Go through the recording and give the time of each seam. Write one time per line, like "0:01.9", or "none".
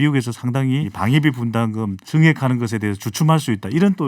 0:00.9
0:02.0